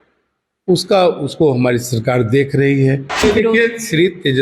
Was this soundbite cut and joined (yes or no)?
yes